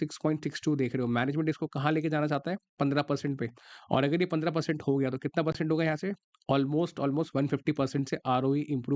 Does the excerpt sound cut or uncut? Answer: uncut